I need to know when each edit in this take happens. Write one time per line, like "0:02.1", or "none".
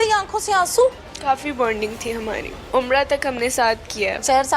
0:01.1
0:02.5